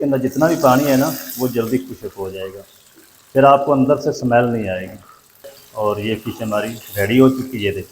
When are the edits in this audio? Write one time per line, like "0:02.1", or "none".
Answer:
0:05.5